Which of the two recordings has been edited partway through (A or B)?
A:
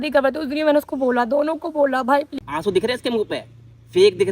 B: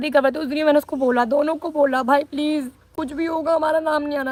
A